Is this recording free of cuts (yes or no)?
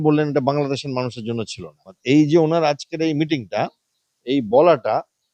no